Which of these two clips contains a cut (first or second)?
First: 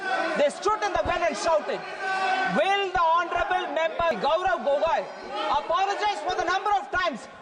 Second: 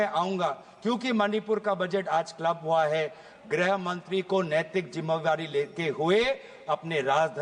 first